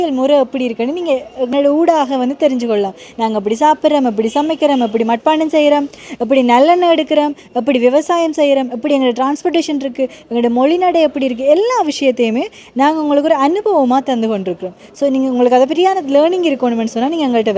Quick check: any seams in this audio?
no; 0 cuts

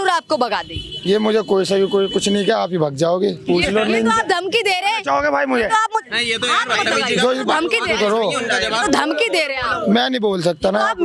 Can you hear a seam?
no; 0 cuts

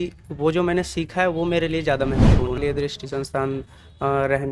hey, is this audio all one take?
no; 1 cut; at 2.5 s

